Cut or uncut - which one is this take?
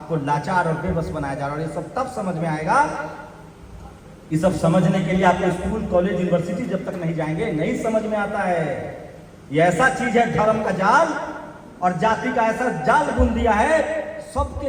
uncut